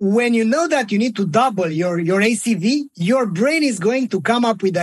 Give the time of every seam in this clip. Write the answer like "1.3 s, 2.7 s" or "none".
1.7 s, 2.9 s